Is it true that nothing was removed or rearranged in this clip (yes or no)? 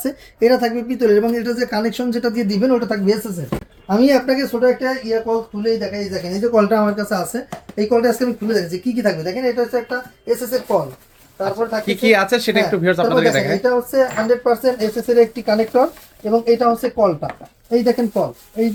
yes